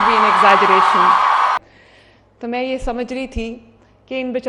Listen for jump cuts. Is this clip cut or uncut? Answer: cut